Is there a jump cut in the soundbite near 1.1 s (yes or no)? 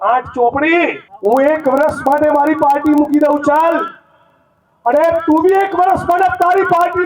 yes